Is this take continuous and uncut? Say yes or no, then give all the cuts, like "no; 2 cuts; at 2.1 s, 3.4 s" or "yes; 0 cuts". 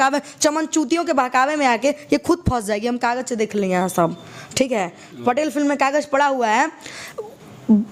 yes; 0 cuts